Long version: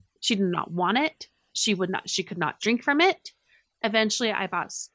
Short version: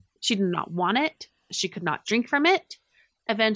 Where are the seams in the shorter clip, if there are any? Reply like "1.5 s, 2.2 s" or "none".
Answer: 1.5 s